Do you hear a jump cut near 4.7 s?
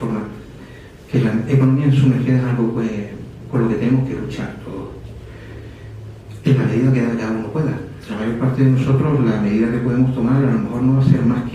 yes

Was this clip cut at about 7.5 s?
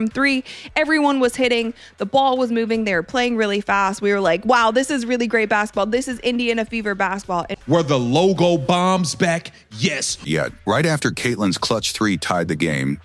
no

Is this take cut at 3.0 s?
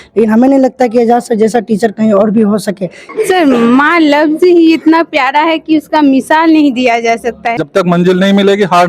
yes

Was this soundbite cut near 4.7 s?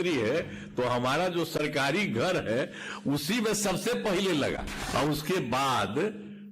yes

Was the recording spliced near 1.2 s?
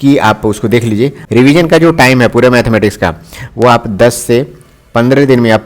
yes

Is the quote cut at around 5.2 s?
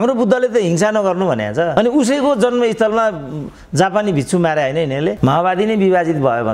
yes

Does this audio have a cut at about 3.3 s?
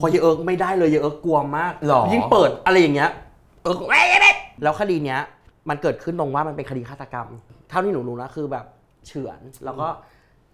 no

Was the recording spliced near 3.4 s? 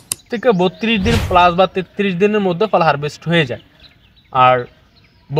no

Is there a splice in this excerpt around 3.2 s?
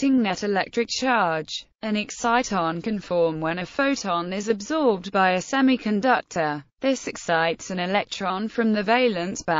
no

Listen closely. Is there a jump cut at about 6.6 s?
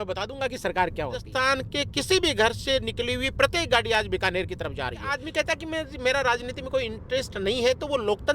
no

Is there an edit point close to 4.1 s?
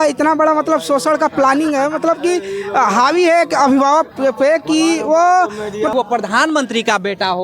no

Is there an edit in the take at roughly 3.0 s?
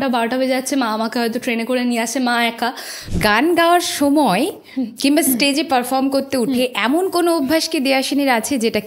yes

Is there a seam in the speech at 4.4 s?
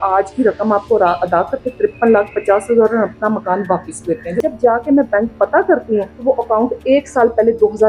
yes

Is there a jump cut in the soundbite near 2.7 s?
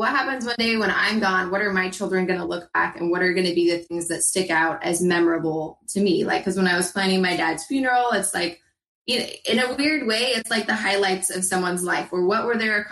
no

